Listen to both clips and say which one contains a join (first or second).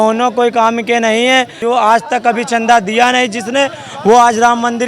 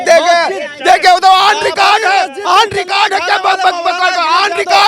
first